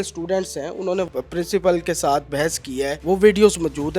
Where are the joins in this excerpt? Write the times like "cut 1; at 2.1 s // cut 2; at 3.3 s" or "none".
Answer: cut 1; at 1.1 s // cut 2; at 3.0 s